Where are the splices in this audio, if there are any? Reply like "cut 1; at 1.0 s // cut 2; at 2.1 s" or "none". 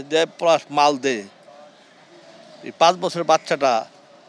none